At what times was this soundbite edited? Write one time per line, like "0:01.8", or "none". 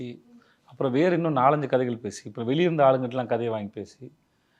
none